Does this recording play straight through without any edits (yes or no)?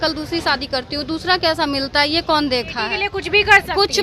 no